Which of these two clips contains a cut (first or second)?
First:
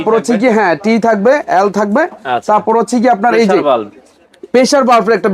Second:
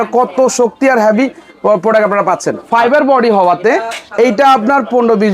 second